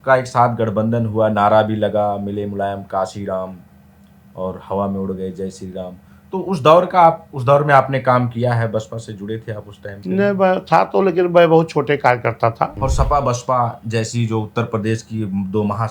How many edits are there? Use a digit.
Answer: 1